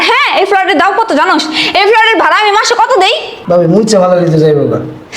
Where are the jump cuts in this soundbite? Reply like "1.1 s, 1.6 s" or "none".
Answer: 3.3 s